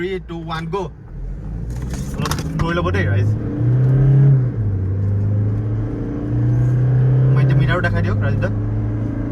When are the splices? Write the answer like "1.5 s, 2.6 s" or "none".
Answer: none